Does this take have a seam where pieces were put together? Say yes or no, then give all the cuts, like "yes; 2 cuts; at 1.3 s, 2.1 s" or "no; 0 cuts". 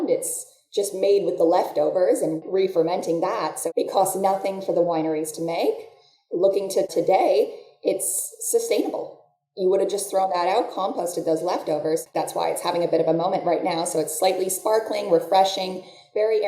yes; 2 cuts; at 6.9 s, 12.1 s